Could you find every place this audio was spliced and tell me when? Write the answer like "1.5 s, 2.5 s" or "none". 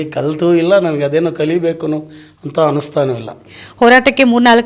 3.4 s